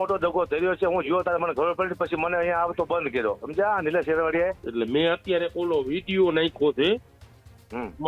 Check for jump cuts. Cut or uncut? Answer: cut